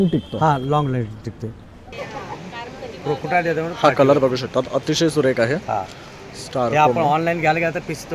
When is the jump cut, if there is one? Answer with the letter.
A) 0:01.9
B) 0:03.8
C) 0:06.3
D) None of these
A